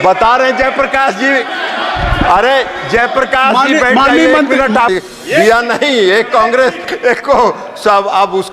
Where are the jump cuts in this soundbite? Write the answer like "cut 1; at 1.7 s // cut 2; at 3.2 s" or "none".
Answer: cut 1; at 4.9 s